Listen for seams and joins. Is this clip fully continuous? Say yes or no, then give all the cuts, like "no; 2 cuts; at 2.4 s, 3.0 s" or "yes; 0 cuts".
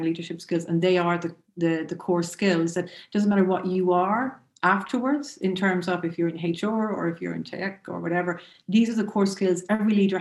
yes; 0 cuts